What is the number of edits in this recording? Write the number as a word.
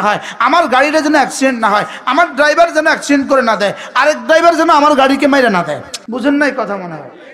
one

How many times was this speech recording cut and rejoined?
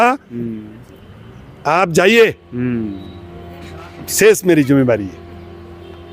zero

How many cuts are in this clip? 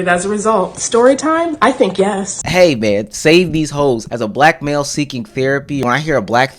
three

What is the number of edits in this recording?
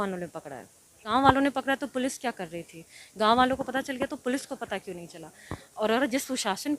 one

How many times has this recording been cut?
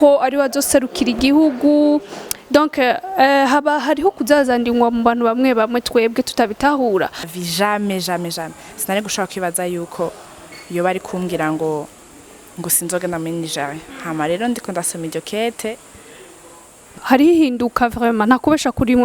two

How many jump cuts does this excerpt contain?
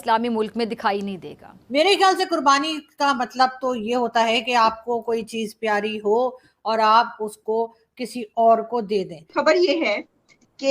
two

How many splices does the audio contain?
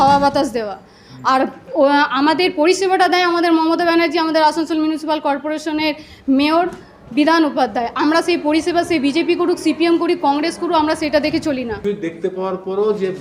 one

